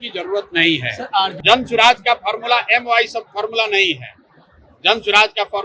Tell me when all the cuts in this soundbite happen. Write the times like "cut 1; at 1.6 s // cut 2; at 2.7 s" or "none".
cut 1; at 1.4 s